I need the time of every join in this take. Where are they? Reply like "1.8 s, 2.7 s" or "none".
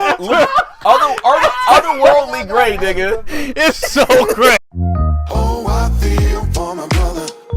4.6 s